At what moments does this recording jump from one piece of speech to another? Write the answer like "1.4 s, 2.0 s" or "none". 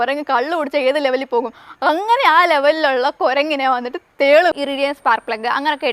4.5 s